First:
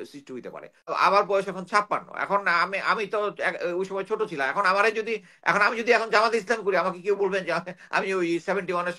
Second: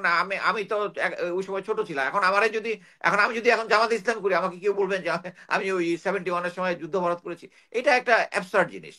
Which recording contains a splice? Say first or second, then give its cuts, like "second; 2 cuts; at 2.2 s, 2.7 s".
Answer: first; 1 cut; at 0.9 s